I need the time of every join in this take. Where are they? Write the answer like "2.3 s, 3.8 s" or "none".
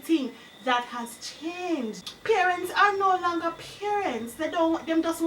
2.1 s